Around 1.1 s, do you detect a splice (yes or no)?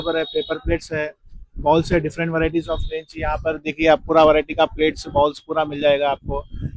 no